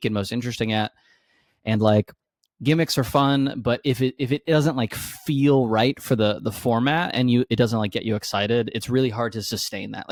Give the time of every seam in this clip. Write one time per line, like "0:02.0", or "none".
none